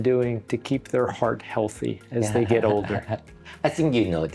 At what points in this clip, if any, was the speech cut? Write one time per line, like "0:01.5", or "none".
none